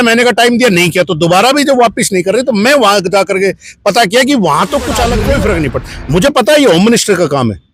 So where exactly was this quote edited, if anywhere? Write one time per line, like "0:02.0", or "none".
0:05.2